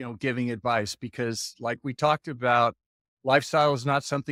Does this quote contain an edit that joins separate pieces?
no; 0 cuts

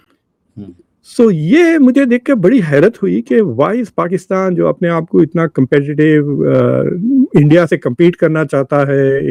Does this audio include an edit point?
no; 0 cuts

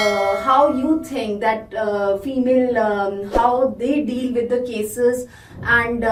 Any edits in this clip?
no; 0 cuts

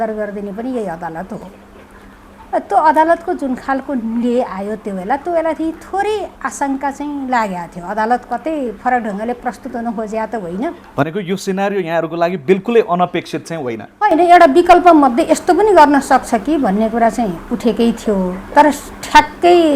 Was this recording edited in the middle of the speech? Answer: no; 0 cuts

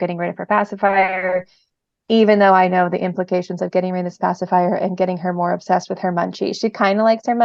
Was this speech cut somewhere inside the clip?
no; 0 cuts

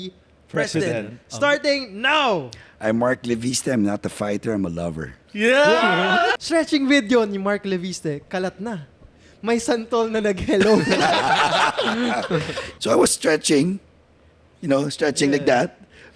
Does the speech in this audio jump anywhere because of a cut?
yes; 2 cuts; at 6.3 s, 12.6 s

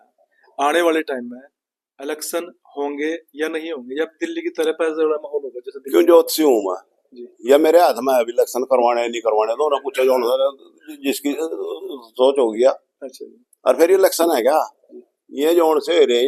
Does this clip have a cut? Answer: no; 0 cuts

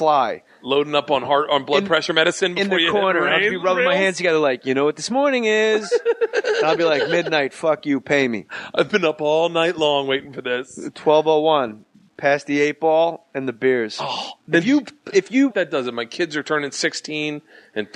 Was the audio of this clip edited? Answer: no; 0 cuts

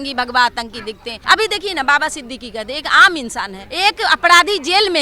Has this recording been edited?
yes; 2 cuts; at 1.1 s, 3.6 s

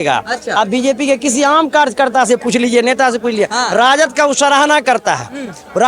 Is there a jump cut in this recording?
no; 0 cuts

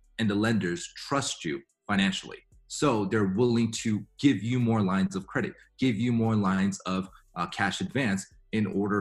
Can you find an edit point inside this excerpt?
no; 0 cuts

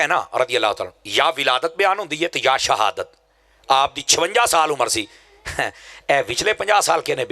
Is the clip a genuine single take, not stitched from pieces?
yes; 0 cuts

